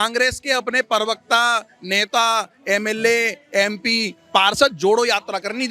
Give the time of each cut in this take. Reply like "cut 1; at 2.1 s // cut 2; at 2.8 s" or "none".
none